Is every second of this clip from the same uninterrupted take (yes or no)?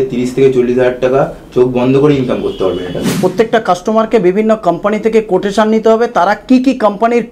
no